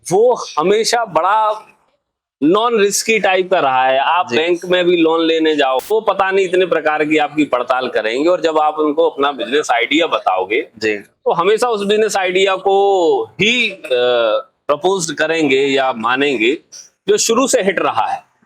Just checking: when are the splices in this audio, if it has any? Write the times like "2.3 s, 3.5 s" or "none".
5.9 s